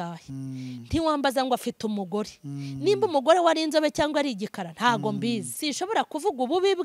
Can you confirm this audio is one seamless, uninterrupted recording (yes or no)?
no